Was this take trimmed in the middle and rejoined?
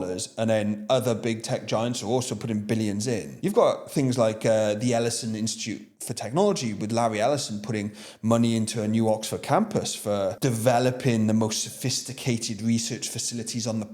yes; 2 cuts; at 3.3 s, 10.4 s

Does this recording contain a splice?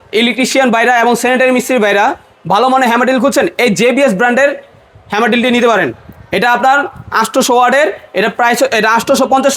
no; 0 cuts

